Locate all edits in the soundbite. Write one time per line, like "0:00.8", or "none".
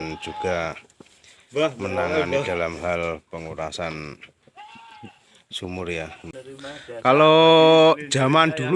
0:06.3